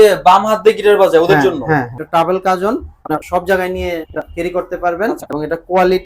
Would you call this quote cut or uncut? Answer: cut